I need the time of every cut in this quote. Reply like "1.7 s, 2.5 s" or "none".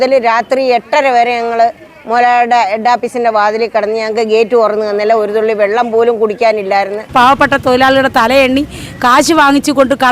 7.1 s

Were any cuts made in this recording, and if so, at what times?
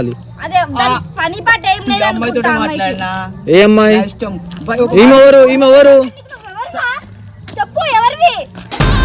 none

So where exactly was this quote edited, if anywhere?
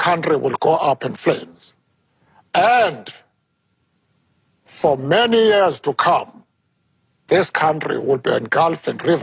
none

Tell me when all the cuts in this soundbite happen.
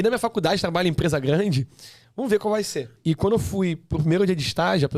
2.9 s

